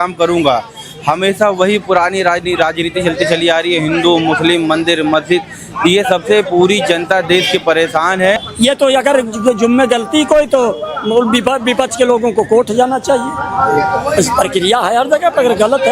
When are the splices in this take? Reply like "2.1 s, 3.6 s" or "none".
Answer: 8.4 s